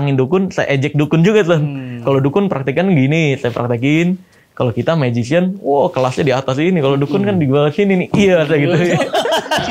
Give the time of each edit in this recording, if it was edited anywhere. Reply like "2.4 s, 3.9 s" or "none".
none